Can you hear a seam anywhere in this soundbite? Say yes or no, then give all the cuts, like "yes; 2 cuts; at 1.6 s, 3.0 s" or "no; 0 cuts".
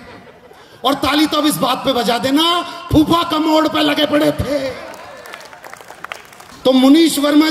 yes; 1 cut; at 6.5 s